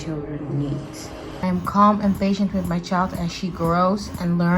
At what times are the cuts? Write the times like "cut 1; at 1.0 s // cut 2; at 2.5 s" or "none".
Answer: cut 1; at 1.3 s